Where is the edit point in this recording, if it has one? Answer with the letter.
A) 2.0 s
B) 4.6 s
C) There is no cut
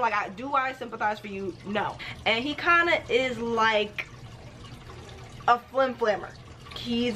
A